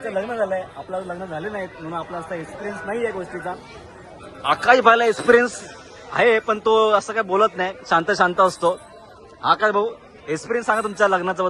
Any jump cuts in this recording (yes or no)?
no